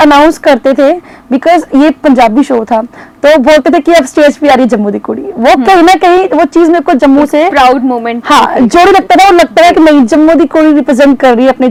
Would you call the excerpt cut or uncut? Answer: uncut